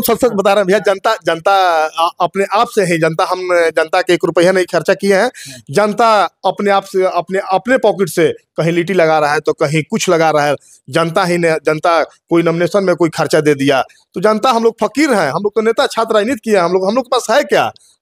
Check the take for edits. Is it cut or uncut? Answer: uncut